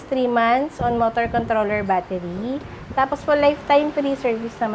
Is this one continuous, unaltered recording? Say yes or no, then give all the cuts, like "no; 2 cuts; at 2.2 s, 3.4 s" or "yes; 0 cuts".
yes; 0 cuts